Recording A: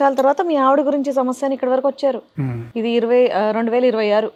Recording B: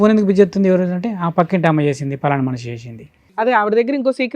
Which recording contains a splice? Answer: B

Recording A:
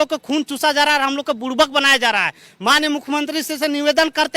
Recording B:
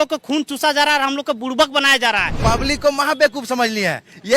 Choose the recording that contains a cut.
B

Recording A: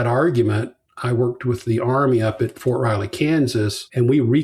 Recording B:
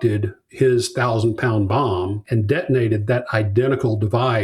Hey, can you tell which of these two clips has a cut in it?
B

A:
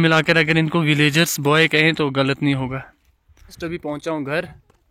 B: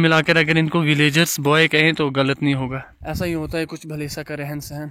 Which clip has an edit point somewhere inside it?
B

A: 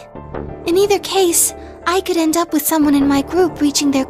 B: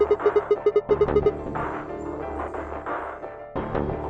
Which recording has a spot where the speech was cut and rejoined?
B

